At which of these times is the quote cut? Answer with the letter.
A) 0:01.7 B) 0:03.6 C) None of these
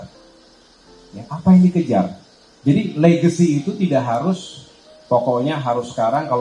C